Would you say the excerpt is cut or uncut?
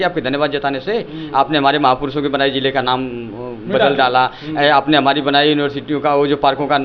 uncut